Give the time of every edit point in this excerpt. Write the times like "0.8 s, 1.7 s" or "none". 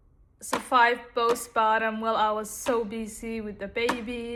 none